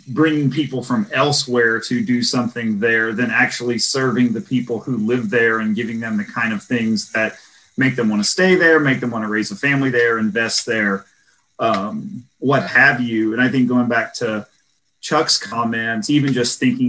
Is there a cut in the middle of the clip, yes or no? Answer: no